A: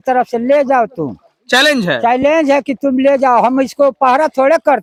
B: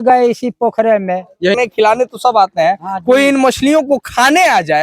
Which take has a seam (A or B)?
B